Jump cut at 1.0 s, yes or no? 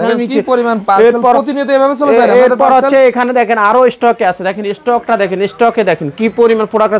no